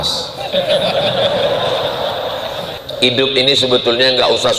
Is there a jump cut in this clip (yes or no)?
yes